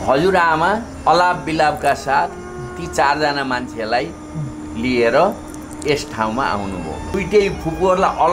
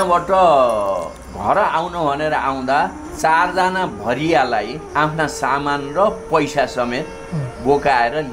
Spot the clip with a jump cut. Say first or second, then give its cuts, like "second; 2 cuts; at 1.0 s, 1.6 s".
first; 2 cuts; at 0.9 s, 7.1 s